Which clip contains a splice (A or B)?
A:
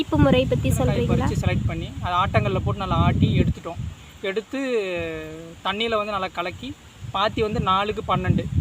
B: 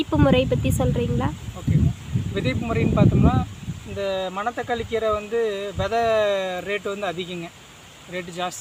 A